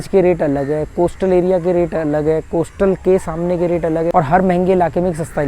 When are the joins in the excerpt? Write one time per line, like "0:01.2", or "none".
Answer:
0:04.1